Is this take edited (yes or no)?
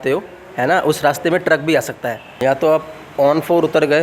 yes